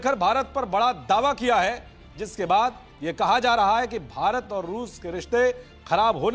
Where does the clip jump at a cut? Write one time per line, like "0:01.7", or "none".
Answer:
none